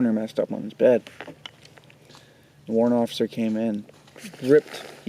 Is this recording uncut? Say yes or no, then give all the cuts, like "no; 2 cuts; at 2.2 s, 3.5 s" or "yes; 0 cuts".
yes; 0 cuts